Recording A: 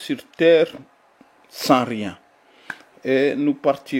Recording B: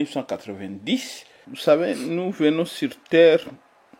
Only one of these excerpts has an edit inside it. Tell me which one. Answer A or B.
B